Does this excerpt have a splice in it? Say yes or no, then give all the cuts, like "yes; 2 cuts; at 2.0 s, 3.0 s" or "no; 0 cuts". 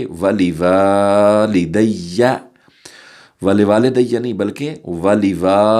no; 0 cuts